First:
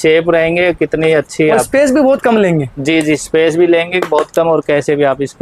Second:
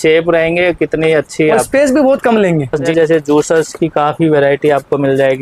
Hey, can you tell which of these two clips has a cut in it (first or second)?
second